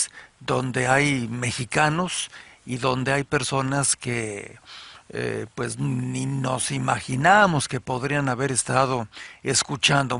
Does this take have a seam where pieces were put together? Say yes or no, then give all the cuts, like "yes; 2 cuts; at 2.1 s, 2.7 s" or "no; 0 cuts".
yes; 1 cut; at 2.1 s